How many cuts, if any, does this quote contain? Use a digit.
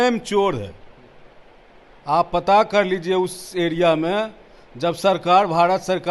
0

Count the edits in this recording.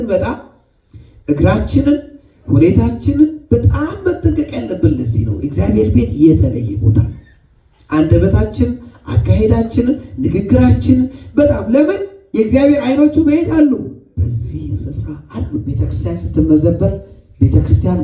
1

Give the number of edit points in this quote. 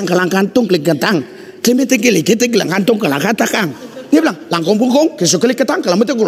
2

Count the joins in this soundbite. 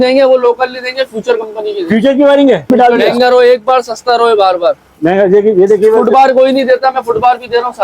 2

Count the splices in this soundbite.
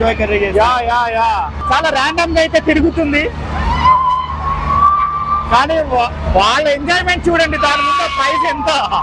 1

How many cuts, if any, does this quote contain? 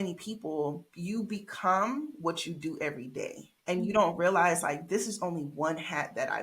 2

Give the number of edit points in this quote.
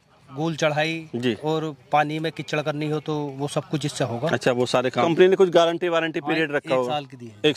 1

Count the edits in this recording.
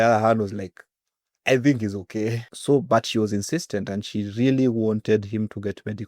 1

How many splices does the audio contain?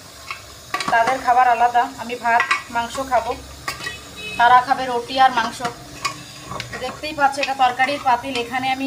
0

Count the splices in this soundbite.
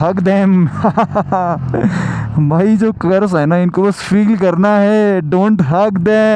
0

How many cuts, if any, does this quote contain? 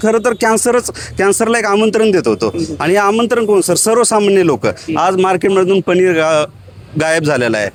0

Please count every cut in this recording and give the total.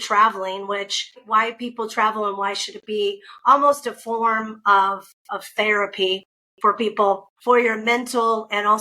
2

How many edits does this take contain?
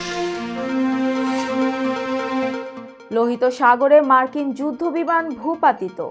0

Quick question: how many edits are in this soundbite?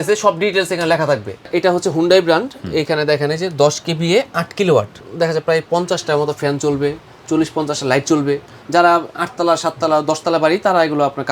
2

